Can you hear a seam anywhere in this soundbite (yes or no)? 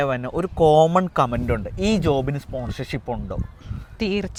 no